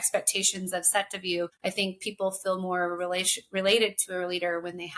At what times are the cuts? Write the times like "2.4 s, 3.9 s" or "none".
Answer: 1.6 s